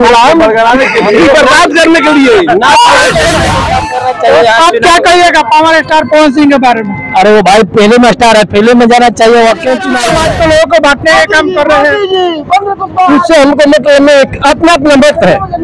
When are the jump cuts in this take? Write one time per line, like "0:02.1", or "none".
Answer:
0:03.6
0:10.0